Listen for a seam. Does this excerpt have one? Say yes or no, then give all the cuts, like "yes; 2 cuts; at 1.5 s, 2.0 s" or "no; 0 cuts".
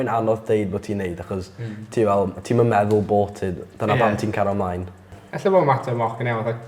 no; 0 cuts